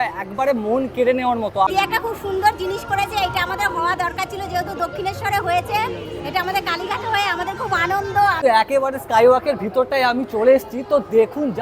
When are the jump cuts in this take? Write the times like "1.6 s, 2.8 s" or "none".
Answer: 1.7 s, 8.4 s